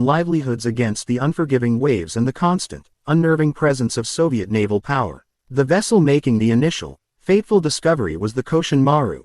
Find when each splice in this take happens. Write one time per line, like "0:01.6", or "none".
0:04.9